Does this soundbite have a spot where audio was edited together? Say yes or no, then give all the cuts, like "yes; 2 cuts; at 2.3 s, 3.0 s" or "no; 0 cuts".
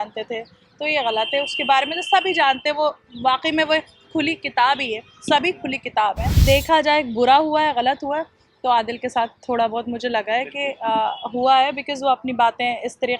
yes; 1 cut; at 6.3 s